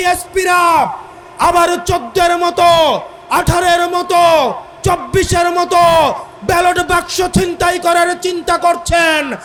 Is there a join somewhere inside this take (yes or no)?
no